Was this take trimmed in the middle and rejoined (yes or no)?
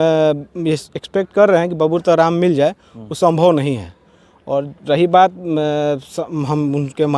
no